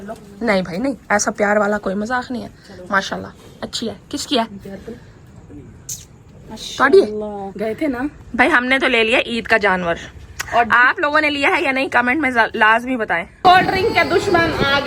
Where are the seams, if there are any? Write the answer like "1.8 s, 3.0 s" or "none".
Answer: 7.4 s, 13.3 s